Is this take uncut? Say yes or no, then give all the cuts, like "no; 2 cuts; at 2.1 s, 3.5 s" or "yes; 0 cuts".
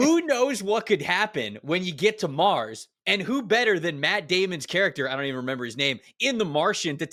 yes; 0 cuts